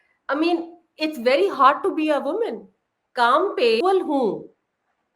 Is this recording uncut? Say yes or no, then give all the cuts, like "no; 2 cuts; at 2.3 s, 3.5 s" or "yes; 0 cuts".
no; 1 cut; at 3.8 s